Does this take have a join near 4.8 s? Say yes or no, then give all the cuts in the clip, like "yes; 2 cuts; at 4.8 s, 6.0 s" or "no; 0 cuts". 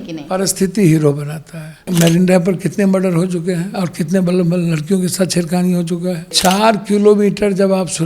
no; 2 cuts; at 1.9 s, 6.3 s